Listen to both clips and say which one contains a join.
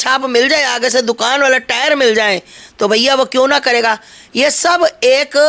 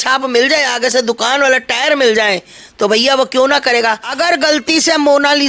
second; 1 cut; at 4.1 s

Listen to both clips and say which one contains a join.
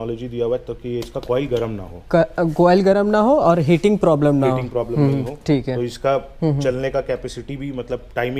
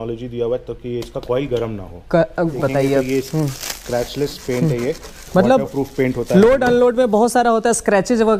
second; 1 cut; at 2.5 s

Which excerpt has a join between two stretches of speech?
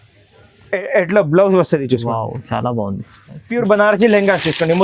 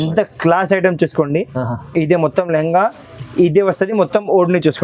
first; 1 cut; at 3.5 s

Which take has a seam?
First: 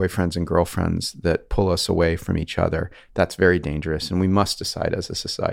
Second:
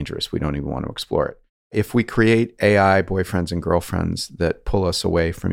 second; 1 cut; at 1.7 s

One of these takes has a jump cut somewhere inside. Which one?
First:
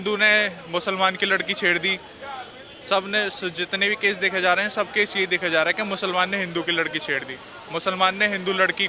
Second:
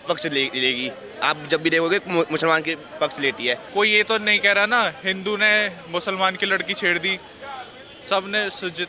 second; 1 cut; at 3.6 s

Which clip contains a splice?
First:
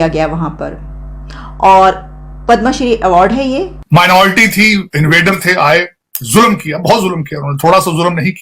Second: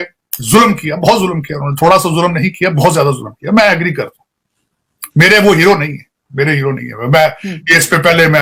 first; 1 cut; at 3.8 s

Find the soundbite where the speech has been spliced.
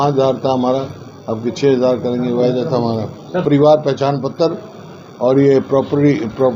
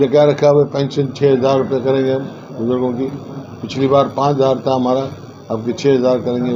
first; 1 cut; at 3.4 s

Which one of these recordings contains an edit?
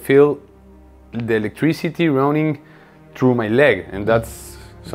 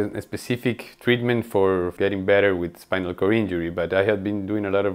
second; 1 cut; at 1.9 s

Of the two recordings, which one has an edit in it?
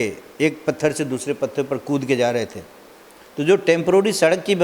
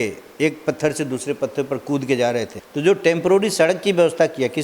second; 1 cut; at 2.6 s

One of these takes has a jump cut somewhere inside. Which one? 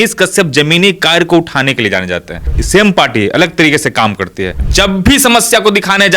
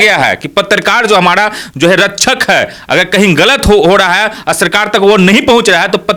first; 2 cuts; at 2.6 s, 4.6 s

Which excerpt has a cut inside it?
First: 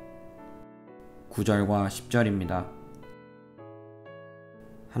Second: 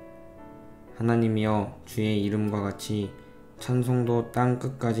second; 1 cut; at 1.0 s

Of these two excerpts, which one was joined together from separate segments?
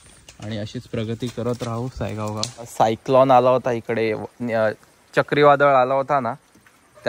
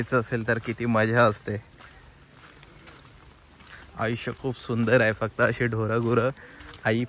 first; 1 cut; at 2.7 s

